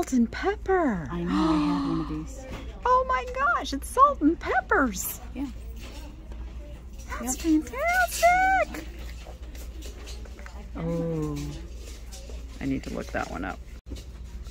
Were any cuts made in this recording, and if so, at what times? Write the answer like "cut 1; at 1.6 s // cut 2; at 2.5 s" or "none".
none